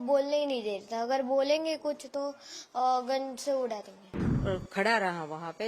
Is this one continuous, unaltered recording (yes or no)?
no